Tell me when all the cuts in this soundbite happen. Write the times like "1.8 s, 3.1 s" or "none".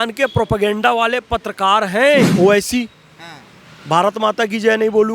2.3 s